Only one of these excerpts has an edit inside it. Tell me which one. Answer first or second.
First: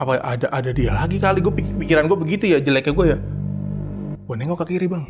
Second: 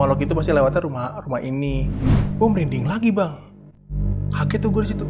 second